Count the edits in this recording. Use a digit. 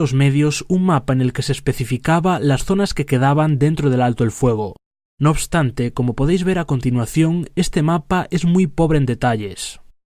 1